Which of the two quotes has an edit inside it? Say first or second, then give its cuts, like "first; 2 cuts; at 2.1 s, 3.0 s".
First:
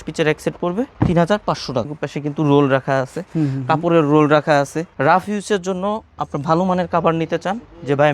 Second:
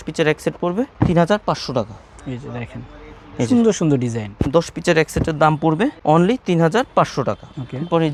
first; 2 cuts; at 2.0 s, 4.8 s